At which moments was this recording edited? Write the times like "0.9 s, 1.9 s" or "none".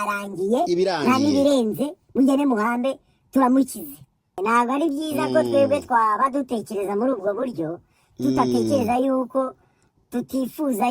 4.4 s